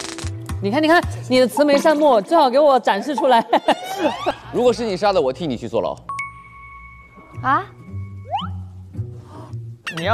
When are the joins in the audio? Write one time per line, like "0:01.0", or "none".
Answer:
0:04.4